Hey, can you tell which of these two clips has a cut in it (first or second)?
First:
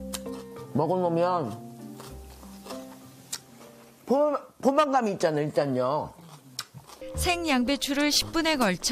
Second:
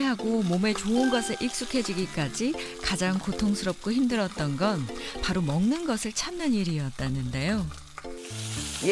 first